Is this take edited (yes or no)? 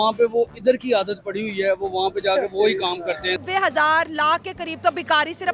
yes